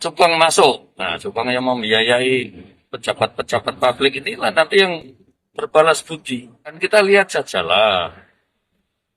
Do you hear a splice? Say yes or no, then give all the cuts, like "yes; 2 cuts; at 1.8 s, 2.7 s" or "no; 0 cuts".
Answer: yes; 1 cut; at 6.8 s